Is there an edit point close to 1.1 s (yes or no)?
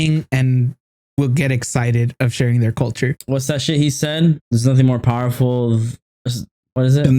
no